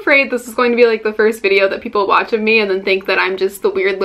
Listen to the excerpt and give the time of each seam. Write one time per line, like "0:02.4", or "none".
none